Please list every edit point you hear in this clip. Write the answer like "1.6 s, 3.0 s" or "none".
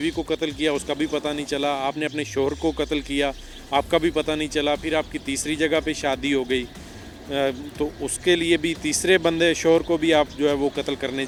none